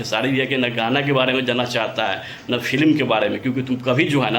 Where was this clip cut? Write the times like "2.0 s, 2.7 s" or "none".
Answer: none